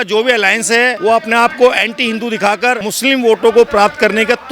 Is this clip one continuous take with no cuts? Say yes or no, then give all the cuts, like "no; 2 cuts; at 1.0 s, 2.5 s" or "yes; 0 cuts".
no; 2 cuts; at 1.0 s, 2.9 s